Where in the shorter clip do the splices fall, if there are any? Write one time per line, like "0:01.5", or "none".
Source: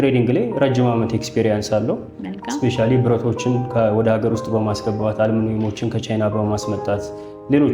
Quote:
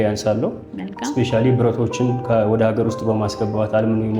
none